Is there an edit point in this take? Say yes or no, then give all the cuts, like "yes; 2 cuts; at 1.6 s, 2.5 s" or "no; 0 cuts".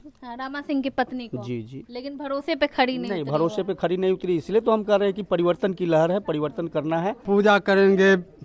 yes; 1 cut; at 7.2 s